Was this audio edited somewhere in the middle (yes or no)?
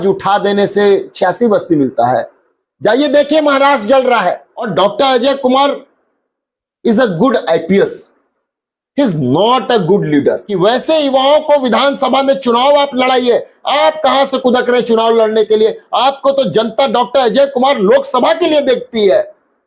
yes